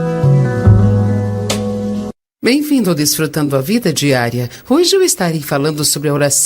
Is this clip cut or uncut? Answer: cut